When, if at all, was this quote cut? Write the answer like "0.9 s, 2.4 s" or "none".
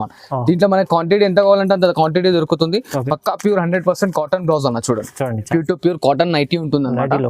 5.5 s

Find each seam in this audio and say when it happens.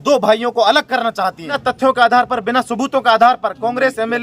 1.6 s

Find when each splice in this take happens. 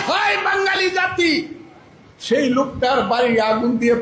1.9 s

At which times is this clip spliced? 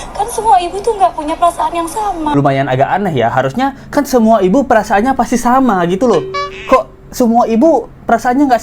2.2 s

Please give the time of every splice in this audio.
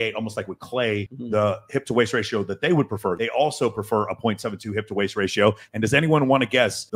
1.1 s, 3.1 s

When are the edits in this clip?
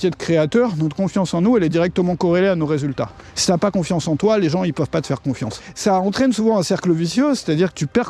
3.2 s, 5.6 s

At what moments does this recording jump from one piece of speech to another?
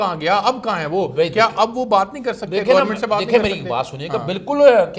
none

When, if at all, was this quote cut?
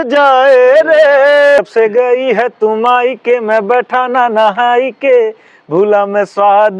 1.6 s

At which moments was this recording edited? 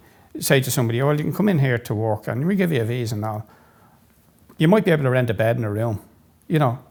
none

